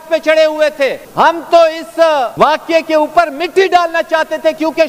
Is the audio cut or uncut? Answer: cut